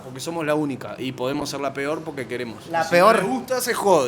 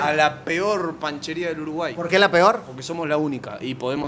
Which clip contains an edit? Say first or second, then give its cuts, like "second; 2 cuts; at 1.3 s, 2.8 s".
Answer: first; 1 cut; at 2.6 s